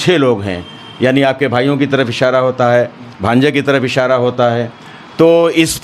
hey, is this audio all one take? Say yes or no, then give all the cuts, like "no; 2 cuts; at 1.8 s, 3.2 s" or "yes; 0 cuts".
yes; 0 cuts